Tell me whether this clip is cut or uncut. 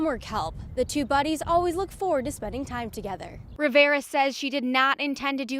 cut